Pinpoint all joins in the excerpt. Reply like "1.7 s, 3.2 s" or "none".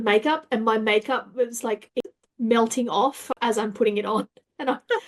2.2 s, 3.3 s